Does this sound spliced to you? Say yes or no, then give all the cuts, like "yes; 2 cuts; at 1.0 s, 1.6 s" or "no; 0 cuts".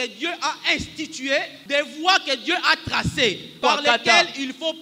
yes; 2 cuts; at 1.6 s, 3.5 s